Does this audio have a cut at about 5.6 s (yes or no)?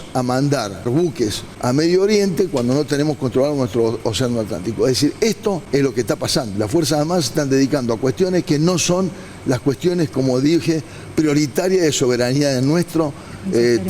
yes